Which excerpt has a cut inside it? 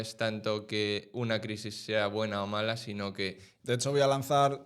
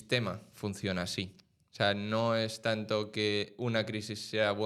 first; 1 cut; at 3.5 s

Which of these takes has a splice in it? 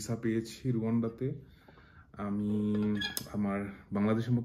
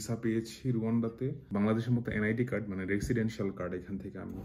second; 1 cut; at 1.4 s

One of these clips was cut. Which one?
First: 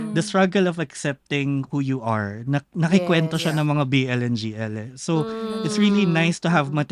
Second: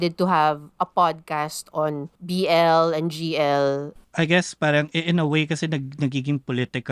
second; 2 cuts; at 2.1 s, 3.9 s

